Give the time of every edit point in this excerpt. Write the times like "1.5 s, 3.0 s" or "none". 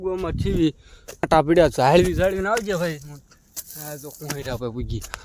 1.3 s

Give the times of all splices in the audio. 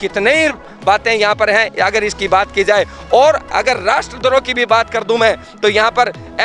none

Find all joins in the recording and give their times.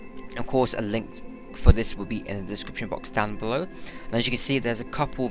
2.3 s

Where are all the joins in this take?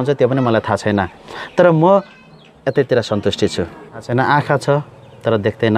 4.1 s

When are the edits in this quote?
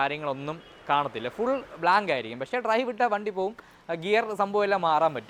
none

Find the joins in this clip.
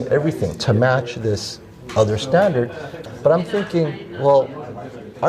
2.9 s

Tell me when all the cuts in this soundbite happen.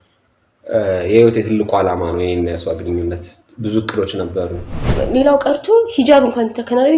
4.9 s

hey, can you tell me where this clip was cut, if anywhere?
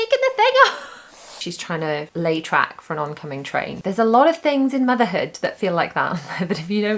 1.6 s, 3.7 s

